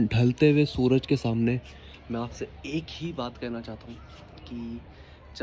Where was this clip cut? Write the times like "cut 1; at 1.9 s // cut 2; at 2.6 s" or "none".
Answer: none

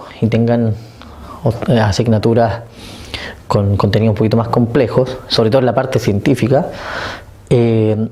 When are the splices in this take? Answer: none

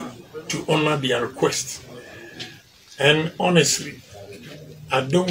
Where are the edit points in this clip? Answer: none

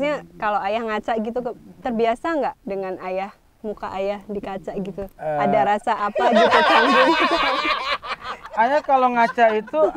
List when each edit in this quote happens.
cut 1; at 5.1 s // cut 2; at 8.4 s

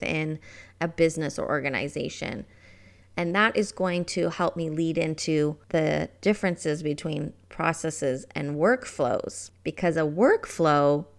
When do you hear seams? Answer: cut 1; at 5.6 s

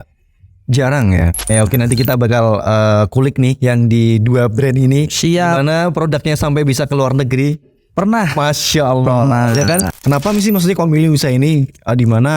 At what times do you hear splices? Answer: cut 1; at 1.5 s // cut 2; at 9.9 s

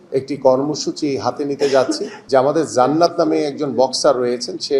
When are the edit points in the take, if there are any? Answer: cut 1; at 2.1 s

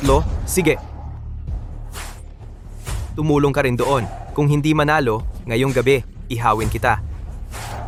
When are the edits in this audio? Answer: none

